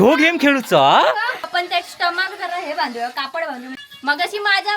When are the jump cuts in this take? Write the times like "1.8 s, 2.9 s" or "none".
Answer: 1.5 s, 3.8 s